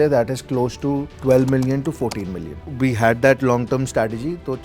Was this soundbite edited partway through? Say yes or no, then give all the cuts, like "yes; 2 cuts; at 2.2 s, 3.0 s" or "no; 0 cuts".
yes; 2 cuts; at 1.1 s, 2.7 s